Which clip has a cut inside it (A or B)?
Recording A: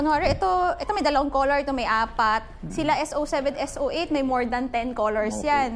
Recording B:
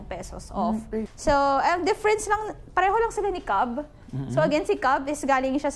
B